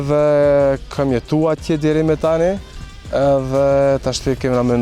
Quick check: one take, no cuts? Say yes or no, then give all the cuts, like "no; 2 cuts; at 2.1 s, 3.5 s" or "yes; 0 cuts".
yes; 0 cuts